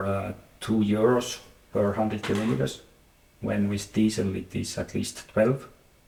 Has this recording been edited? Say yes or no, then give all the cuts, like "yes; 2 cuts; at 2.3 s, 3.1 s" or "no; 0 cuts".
no; 0 cuts